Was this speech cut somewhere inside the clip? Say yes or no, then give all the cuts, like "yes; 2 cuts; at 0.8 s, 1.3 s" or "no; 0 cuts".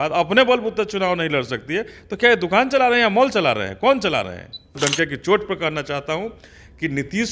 yes; 1 cut; at 4.8 s